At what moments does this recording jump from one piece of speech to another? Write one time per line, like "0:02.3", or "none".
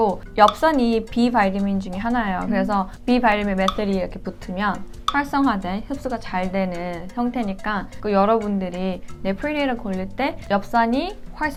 none